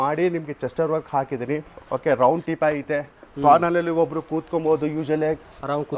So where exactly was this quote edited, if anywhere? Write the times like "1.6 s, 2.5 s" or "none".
1.8 s